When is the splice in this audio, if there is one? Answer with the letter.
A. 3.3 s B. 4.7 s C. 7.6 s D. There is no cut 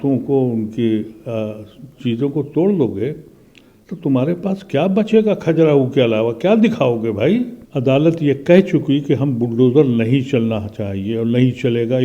C